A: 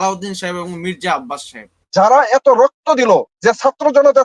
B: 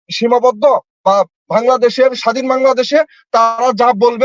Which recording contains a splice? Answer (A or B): A